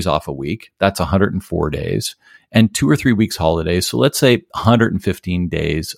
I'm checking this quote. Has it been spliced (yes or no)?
no